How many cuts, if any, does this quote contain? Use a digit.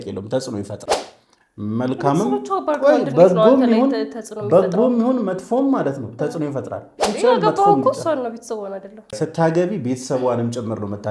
2